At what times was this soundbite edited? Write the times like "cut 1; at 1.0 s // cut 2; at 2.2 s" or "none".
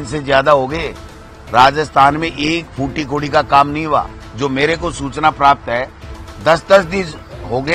cut 1; at 4.2 s